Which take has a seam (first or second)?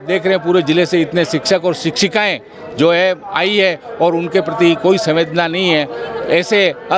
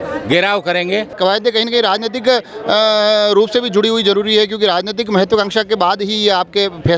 second